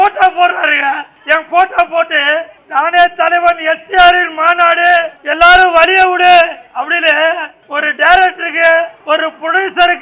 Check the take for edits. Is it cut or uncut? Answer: cut